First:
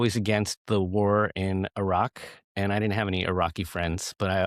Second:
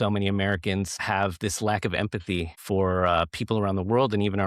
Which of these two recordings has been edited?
second; 2 cuts; at 1.0 s, 2.6 s

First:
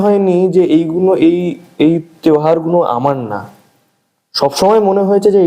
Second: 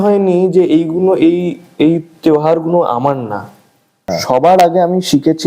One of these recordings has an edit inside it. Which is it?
second; 1 cut; at 4.1 s

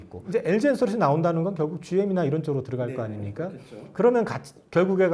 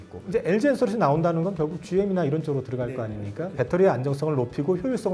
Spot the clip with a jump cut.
second; 1 cut; at 3.5 s

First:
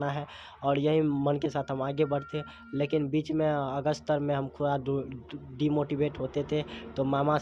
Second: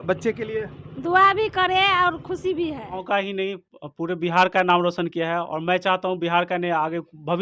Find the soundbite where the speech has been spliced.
second; 1 cut; at 3.0 s

